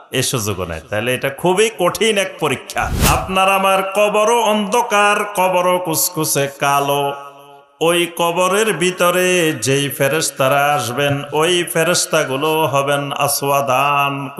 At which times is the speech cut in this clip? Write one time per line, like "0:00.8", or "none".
0:03.0